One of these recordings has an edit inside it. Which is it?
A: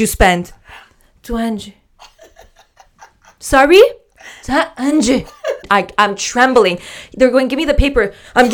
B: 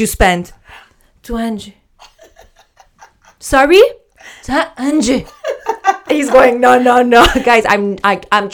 A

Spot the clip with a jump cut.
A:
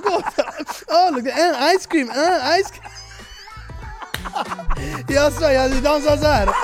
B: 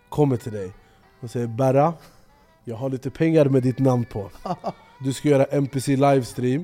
B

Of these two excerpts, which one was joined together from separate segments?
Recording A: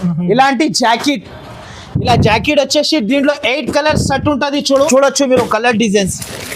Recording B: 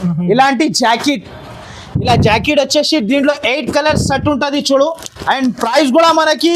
A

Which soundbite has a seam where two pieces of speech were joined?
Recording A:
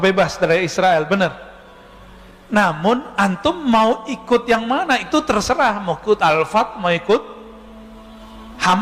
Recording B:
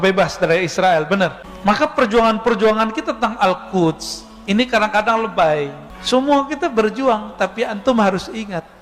B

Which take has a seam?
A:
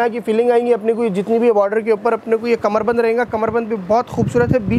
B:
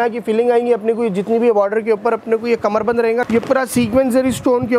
B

